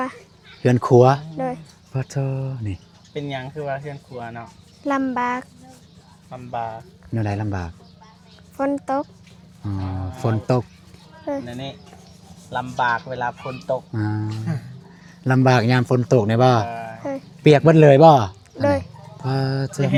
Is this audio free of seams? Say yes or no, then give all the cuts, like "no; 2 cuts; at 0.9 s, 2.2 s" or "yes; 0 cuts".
yes; 0 cuts